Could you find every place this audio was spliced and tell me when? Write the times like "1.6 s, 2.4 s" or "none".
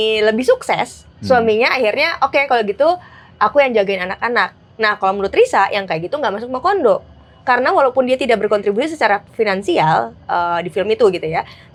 none